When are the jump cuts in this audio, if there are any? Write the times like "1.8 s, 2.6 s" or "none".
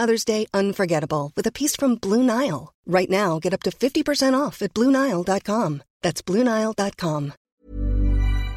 7.4 s